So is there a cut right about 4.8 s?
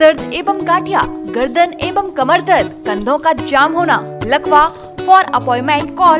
yes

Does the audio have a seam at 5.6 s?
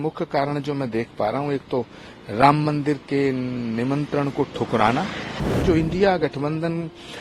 yes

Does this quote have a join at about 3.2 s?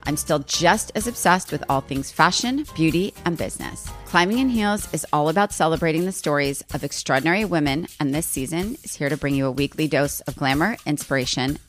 no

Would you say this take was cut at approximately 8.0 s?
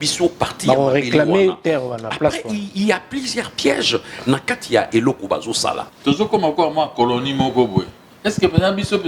yes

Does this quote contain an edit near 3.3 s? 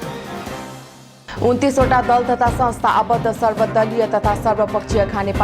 no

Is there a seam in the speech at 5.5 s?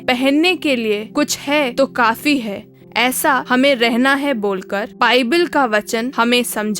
no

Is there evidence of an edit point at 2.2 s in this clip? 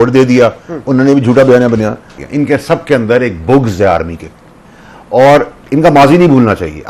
yes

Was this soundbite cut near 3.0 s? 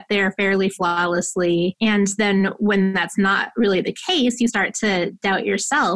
no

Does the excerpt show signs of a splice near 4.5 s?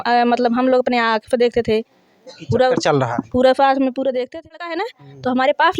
yes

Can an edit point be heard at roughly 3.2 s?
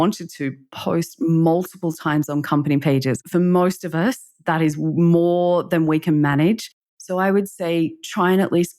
yes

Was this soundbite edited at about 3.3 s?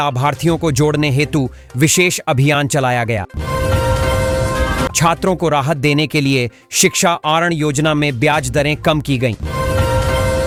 no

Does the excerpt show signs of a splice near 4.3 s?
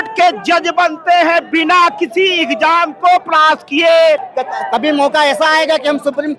yes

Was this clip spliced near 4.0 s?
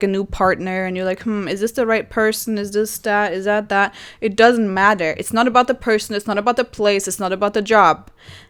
no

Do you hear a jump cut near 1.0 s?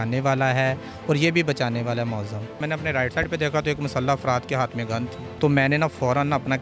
no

